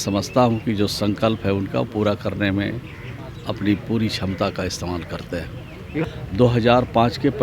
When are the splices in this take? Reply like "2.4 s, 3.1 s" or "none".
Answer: 6.0 s